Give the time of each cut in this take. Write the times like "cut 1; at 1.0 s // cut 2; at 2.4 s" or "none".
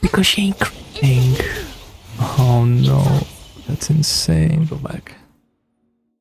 cut 1; at 4.8 s